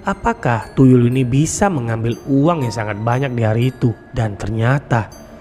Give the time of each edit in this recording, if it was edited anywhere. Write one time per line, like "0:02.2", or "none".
0:04.1